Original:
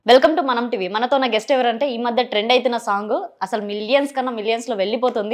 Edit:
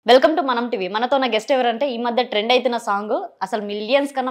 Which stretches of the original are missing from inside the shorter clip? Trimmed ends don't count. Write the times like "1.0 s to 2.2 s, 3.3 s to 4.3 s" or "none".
none